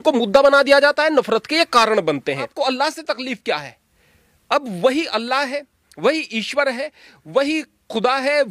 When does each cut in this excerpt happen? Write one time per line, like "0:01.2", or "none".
0:02.5